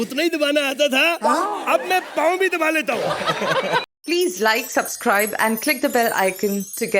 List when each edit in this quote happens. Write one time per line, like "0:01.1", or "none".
0:03.8